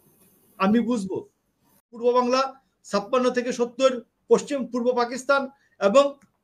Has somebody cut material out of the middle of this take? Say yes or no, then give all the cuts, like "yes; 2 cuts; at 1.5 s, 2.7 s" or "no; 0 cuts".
yes; 1 cut; at 1.9 s